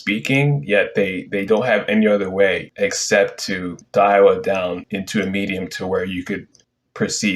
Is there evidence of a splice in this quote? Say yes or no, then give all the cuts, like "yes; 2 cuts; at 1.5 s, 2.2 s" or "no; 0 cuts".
yes; 3 cuts; at 2.7 s, 3.8 s, 4.8 s